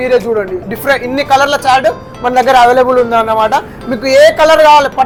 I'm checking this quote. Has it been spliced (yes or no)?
no